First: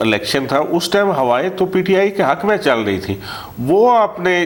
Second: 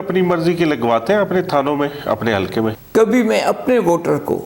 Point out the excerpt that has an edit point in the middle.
second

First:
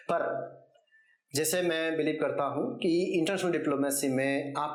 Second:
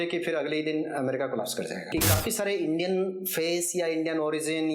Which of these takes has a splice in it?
second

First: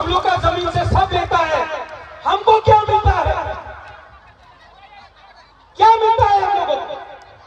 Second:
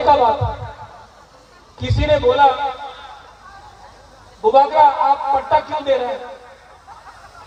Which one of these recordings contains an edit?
first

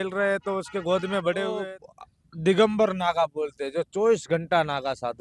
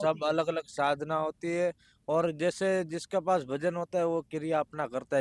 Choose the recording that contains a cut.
first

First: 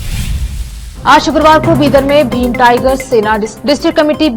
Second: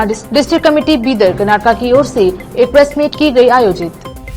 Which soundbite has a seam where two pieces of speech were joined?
first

